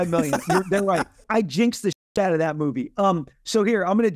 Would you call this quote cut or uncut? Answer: cut